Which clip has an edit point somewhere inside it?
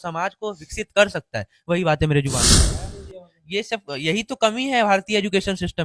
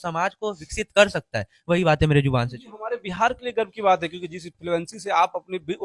first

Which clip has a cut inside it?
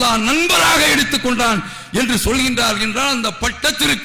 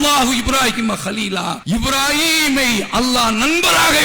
second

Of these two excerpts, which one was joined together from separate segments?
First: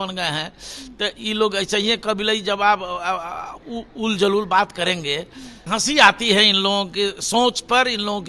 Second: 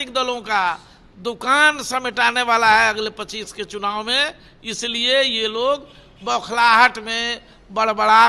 first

